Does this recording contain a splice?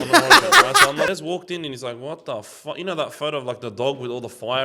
yes; 1 cut; at 1.1 s

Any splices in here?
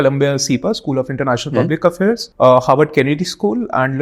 no; 0 cuts

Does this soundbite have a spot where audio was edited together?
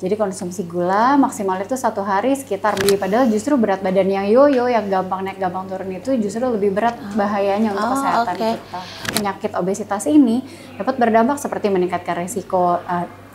yes; 2 cuts; at 2.8 s, 9.1 s

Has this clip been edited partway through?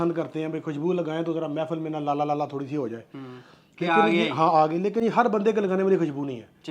no; 0 cuts

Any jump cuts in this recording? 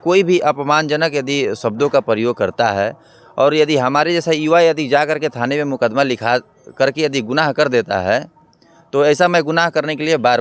no; 0 cuts

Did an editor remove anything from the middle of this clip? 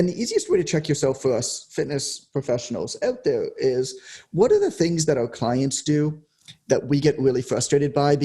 no; 0 cuts

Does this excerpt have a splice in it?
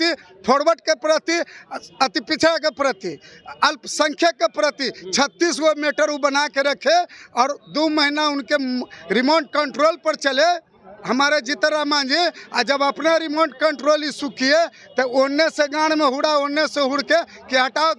no; 0 cuts

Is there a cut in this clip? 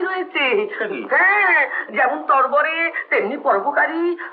no; 0 cuts

